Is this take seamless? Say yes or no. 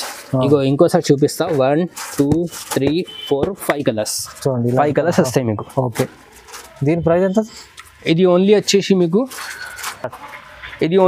yes